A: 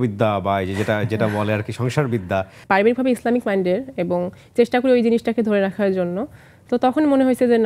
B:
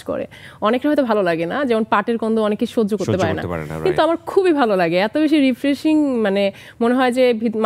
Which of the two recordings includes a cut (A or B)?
A